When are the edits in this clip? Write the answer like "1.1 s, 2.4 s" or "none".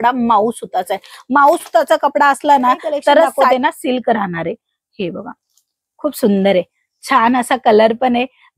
3.5 s